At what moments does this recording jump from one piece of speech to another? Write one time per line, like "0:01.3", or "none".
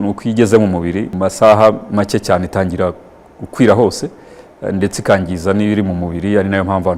0:01.0